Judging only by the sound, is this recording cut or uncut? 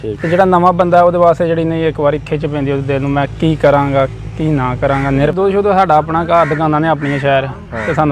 cut